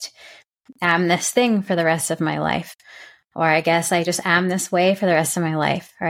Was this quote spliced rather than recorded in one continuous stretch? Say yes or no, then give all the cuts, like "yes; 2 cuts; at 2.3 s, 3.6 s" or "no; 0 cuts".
no; 0 cuts